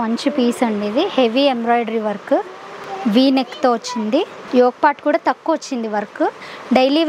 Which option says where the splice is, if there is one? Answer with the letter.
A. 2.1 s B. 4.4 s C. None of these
B